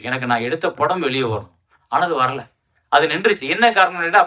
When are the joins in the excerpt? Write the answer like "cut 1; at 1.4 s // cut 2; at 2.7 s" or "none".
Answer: none